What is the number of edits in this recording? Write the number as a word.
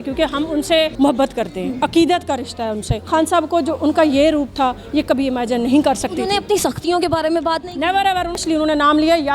three